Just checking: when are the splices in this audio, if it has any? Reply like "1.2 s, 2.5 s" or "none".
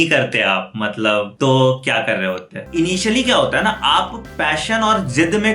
1.3 s, 2.6 s